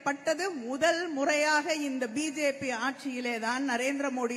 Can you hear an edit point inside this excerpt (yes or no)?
no